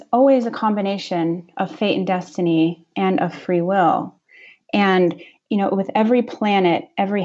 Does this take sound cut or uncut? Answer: uncut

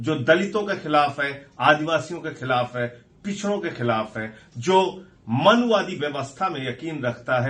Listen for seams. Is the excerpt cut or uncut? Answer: uncut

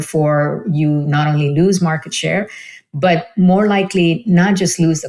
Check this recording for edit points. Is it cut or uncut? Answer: uncut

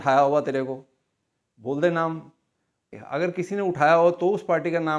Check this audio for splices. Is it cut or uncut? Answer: cut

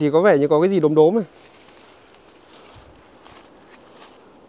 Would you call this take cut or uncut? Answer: uncut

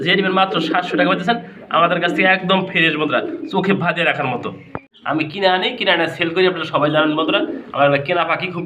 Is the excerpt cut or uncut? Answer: cut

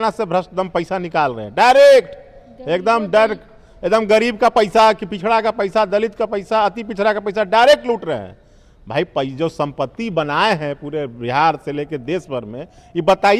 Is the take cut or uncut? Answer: uncut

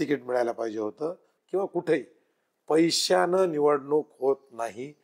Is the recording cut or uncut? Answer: cut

